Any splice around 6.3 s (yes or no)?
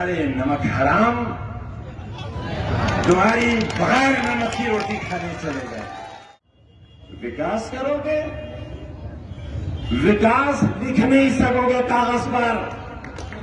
yes